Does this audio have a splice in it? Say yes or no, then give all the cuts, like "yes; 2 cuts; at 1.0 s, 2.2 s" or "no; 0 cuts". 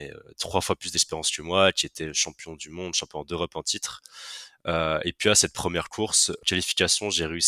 yes; 1 cut; at 6.4 s